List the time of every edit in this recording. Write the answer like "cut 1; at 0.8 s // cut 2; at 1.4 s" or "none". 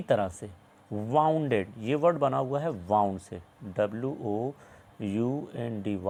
none